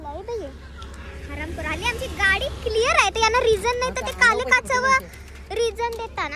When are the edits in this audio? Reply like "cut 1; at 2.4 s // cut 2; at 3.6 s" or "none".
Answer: none